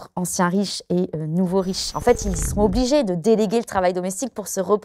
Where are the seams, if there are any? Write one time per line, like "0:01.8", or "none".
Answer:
0:01.8